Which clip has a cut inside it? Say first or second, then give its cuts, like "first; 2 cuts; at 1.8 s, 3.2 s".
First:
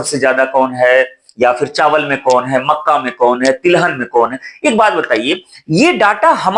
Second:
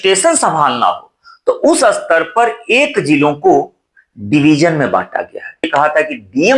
second; 1 cut; at 5.7 s